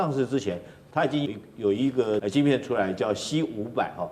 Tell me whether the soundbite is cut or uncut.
cut